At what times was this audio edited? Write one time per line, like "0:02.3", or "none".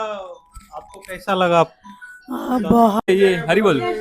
0:03.1